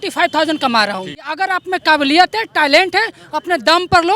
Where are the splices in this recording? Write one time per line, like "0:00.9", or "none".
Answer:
0:01.3